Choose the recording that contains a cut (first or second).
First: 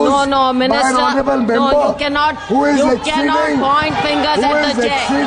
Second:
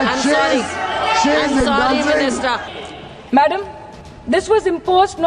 second